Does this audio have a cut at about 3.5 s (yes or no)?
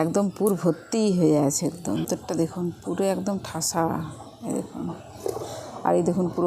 no